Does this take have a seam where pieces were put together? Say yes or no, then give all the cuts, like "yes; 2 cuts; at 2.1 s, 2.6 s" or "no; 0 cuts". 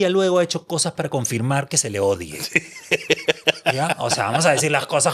no; 0 cuts